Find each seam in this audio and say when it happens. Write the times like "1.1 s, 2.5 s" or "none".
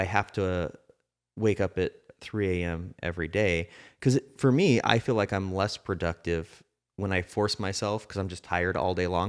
none

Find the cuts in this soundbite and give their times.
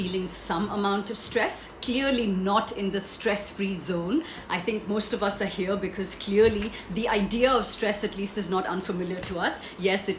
4.4 s

